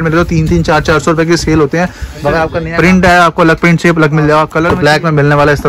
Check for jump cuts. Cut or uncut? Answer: cut